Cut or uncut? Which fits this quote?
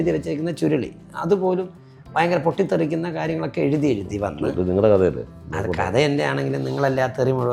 uncut